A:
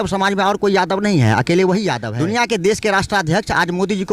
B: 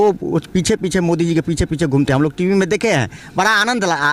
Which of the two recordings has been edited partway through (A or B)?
A